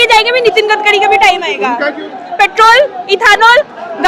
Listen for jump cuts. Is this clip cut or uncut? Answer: uncut